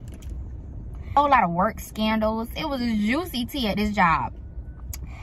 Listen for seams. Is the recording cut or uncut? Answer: cut